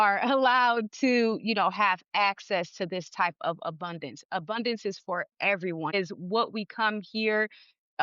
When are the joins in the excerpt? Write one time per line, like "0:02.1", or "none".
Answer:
0:05.9